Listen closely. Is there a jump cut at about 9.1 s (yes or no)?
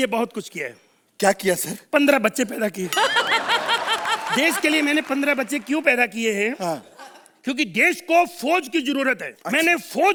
no